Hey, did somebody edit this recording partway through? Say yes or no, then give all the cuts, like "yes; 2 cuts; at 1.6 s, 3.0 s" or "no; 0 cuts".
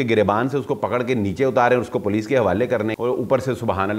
yes; 1 cut; at 2.9 s